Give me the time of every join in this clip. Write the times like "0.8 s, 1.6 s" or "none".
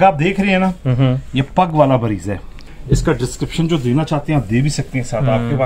2.7 s